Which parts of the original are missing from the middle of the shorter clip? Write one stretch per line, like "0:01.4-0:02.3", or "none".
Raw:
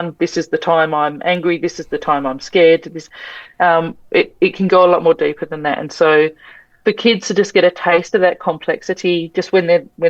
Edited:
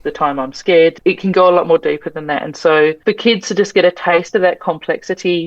0:02.8-0:04.3
0:06.3-0:06.8